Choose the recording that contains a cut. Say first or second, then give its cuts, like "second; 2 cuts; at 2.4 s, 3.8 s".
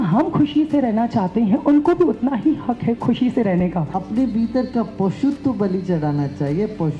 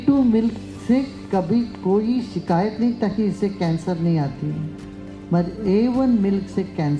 first; 2 cuts; at 3.0 s, 3.9 s